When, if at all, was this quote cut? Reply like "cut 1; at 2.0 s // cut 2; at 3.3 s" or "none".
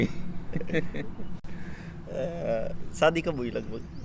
none